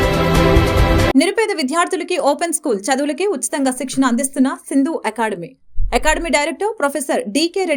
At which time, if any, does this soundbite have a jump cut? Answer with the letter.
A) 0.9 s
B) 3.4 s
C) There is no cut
A